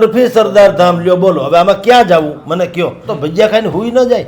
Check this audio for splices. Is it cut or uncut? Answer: cut